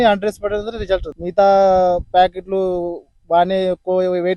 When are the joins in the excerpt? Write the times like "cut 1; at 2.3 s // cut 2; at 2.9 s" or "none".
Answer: cut 1; at 1.2 s